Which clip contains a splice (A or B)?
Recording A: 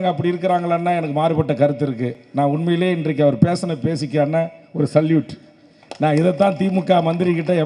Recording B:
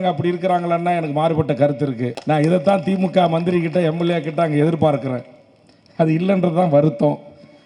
B